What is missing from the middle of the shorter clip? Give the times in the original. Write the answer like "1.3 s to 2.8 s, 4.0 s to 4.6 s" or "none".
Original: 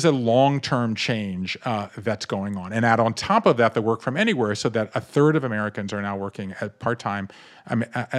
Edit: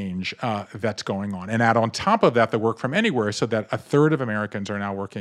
none